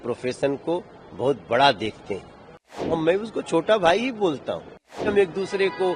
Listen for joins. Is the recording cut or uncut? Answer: cut